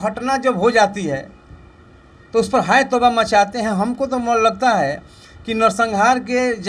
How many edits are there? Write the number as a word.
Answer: zero